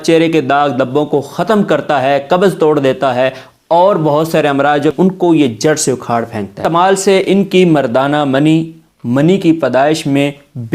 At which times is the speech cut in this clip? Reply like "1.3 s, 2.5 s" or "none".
4.9 s, 6.6 s